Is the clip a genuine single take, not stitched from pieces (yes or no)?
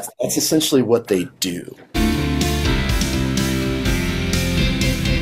no